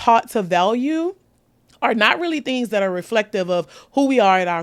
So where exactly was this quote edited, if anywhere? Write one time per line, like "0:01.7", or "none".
none